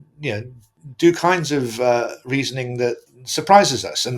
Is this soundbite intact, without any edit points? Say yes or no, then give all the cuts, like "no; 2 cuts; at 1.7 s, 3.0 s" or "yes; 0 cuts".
yes; 0 cuts